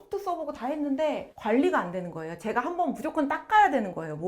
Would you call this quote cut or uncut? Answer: cut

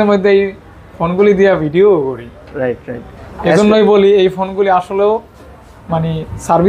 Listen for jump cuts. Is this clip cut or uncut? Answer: uncut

